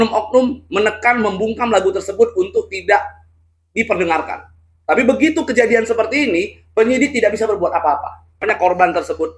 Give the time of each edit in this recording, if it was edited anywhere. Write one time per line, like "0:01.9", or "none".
0:08.4

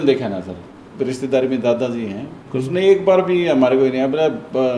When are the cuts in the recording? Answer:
0:02.4

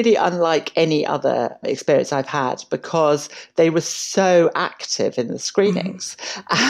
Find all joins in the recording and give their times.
none

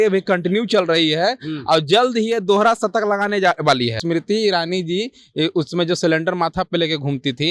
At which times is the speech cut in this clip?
0:04.0

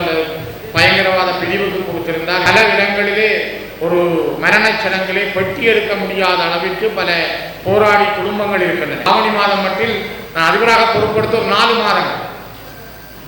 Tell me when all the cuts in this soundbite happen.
0:02.5
0:09.0

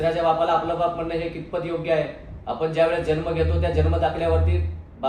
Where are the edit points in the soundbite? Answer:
none

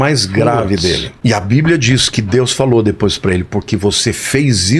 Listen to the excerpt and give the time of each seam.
0:01.1

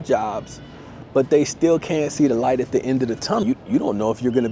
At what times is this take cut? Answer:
0:03.4

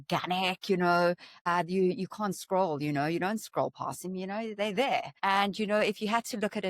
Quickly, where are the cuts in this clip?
0:01.5
0:05.1

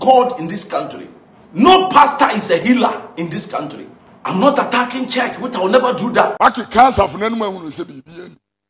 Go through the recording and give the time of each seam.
0:06.3

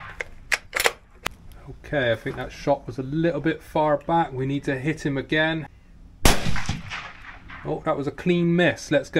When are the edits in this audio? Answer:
0:01.1
0:05.7

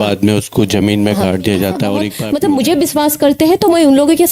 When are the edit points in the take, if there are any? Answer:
0:02.1

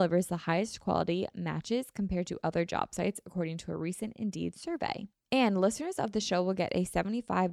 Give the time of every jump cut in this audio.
0:05.1

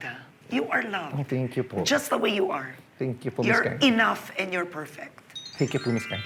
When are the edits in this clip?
none

